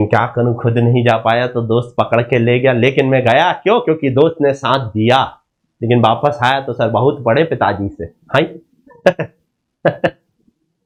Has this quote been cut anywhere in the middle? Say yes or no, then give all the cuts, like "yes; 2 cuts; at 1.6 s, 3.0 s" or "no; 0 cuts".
no; 0 cuts